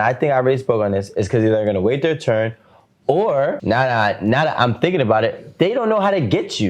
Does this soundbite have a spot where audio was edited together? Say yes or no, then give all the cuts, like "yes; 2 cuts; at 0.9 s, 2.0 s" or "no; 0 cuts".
yes; 1 cut; at 3.6 s